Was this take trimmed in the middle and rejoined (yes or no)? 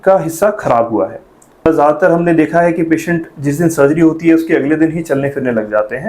yes